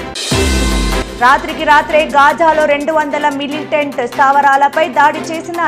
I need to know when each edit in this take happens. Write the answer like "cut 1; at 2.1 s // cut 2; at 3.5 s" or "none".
none